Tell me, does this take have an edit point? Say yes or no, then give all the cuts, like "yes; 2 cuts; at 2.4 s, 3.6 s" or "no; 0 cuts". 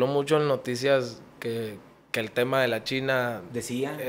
no; 0 cuts